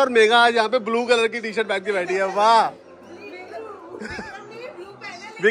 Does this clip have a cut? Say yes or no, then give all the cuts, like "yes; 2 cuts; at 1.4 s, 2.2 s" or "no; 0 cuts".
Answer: no; 0 cuts